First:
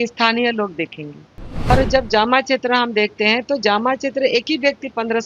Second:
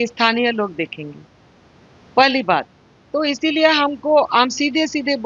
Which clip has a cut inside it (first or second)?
first